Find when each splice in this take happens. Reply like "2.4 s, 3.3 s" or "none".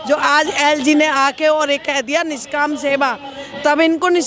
none